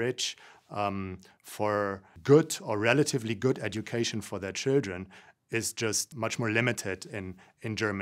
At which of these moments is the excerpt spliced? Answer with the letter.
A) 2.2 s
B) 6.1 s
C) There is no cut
B